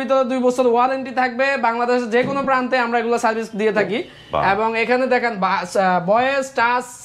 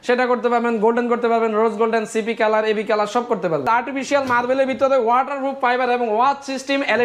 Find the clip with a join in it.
second; 1 cut; at 3.6 s

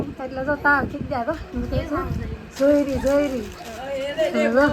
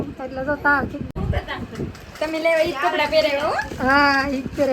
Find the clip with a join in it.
second; 1 cut; at 1.2 s

